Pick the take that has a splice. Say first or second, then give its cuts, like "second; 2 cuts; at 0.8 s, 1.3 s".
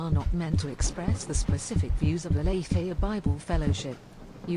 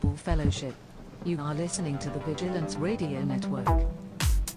second; 1 cut; at 3.6 s